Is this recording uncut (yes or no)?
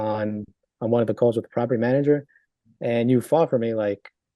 yes